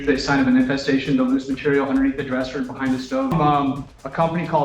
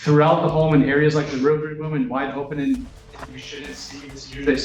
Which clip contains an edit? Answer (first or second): first